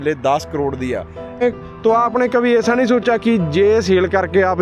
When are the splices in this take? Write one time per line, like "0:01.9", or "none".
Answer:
0:01.4